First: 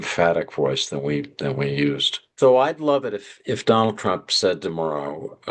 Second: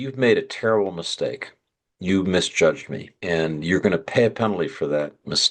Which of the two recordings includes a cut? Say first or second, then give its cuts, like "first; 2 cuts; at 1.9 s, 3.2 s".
first; 1 cut; at 2.2 s